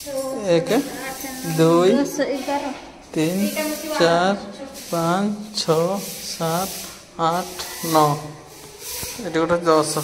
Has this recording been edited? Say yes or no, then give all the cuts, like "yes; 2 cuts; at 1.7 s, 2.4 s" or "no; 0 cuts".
no; 0 cuts